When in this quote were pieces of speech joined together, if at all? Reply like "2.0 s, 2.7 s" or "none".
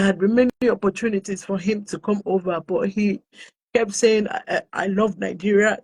none